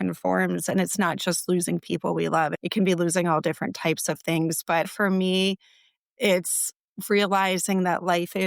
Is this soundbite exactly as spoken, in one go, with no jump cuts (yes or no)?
no